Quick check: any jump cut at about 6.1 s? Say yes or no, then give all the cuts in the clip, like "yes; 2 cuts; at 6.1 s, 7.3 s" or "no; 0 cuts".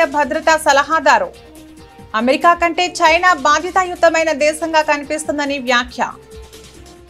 yes; 1 cut; at 6.1 s